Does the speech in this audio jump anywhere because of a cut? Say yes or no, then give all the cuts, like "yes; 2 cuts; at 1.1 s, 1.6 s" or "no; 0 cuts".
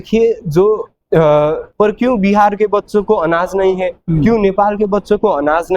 yes; 1 cut; at 1.7 s